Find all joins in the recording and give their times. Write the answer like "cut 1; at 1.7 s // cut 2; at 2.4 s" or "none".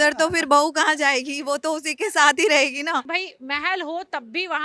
cut 1; at 3.2 s